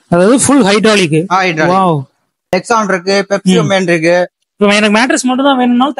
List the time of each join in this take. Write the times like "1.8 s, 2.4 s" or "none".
2.4 s